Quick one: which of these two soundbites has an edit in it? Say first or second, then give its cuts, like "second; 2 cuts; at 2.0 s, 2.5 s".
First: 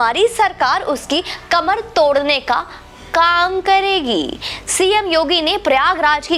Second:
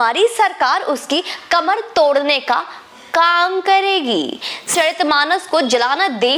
second; 1 cut; at 4.7 s